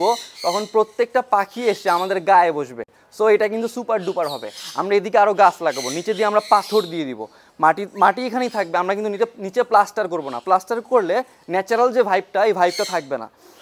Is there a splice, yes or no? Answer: no